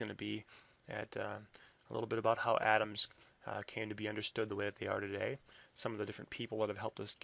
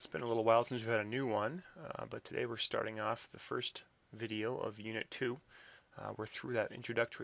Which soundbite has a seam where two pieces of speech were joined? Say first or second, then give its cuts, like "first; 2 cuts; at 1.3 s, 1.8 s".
second; 1 cut; at 5.0 s